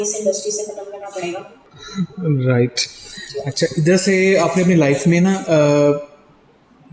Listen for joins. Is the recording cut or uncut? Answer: uncut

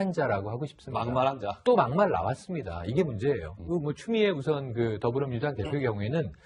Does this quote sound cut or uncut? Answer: uncut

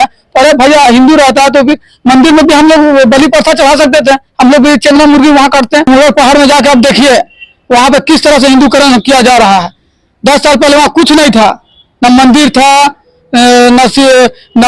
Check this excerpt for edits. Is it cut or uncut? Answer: cut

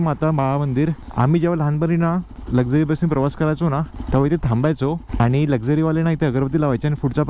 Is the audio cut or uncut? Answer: cut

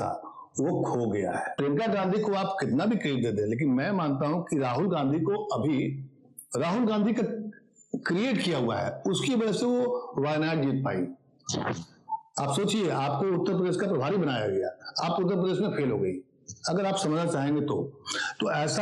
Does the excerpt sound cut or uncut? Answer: cut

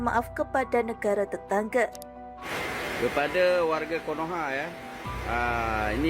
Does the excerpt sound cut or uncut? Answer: cut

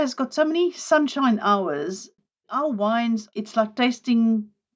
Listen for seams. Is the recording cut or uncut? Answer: cut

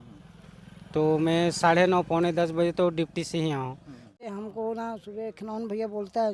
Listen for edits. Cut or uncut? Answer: cut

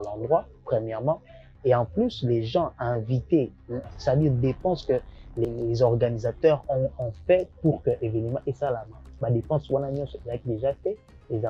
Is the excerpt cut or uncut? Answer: cut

